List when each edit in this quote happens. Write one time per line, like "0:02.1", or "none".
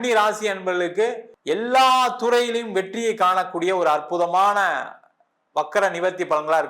0:01.3